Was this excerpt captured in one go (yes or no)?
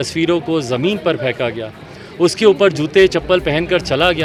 yes